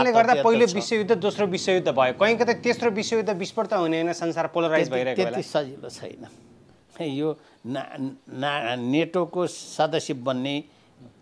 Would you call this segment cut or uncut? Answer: uncut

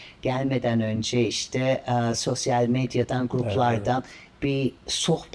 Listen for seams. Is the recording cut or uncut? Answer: uncut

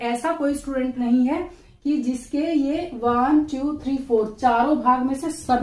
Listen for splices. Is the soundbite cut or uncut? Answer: uncut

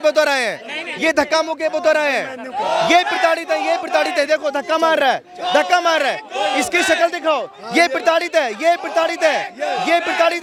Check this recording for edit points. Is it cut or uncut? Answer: uncut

